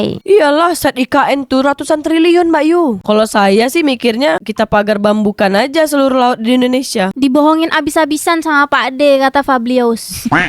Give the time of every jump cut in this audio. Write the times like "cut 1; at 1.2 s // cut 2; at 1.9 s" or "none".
cut 1; at 3.0 s // cut 2; at 7.1 s